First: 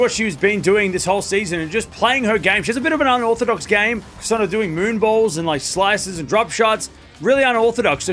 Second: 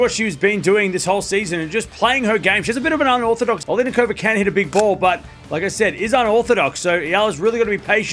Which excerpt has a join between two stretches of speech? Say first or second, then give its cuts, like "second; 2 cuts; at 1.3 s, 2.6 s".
second; 1 cut; at 3.6 s